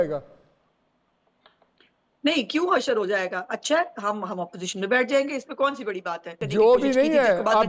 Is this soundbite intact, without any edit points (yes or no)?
no